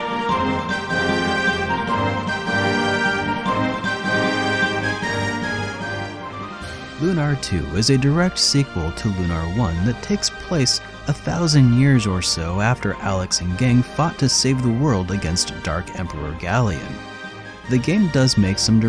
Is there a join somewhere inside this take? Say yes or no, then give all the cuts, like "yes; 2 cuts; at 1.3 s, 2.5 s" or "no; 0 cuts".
no; 0 cuts